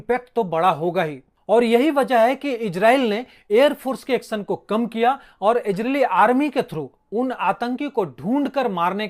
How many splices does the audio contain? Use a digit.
0